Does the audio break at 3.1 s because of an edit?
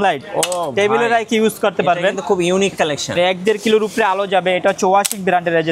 yes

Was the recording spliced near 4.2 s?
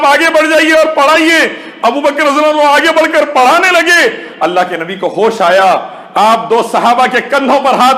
no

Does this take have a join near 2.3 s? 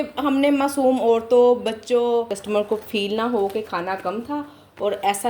yes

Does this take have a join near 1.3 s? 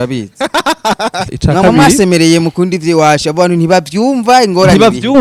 yes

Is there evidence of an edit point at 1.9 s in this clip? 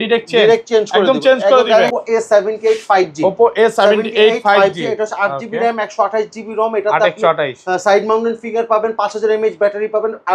yes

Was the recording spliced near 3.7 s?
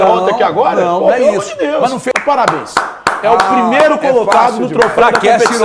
no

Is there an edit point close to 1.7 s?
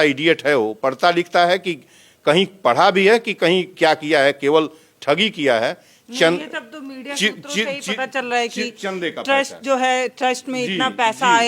no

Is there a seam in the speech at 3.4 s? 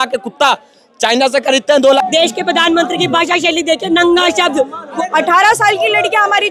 no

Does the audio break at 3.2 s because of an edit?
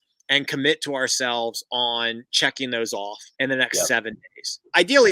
yes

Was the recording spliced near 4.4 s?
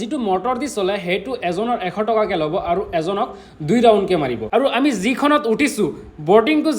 yes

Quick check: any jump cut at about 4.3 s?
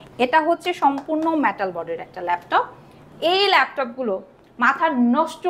no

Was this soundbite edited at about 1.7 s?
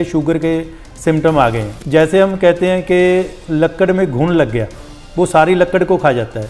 yes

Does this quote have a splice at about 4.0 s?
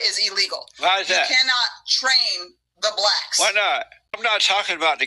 yes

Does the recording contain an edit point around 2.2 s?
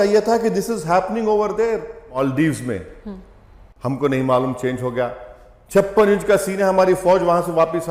yes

